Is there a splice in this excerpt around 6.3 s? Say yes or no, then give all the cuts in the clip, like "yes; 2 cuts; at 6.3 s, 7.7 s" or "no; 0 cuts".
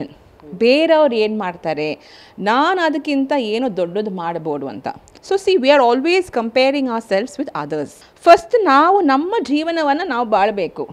no; 0 cuts